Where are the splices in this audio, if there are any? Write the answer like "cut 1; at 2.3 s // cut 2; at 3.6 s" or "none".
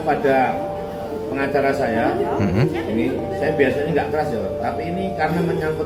none